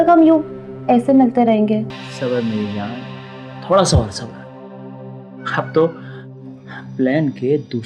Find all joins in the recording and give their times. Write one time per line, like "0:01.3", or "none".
0:02.0